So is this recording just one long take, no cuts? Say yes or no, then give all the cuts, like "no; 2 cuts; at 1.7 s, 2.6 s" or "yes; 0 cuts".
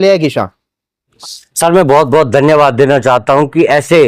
no; 1 cut; at 1.1 s